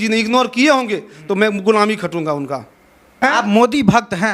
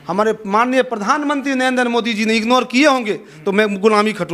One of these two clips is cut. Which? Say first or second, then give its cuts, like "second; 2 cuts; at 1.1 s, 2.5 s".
first; 1 cut; at 3.2 s